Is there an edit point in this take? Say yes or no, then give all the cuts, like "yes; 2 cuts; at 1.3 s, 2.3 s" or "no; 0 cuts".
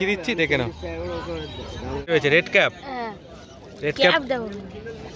yes; 1 cut; at 2.1 s